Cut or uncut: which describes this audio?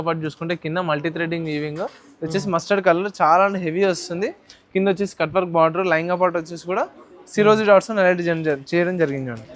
uncut